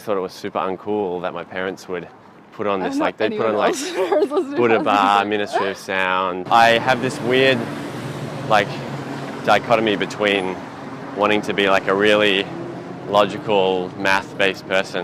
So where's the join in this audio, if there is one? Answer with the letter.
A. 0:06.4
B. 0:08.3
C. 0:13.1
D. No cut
A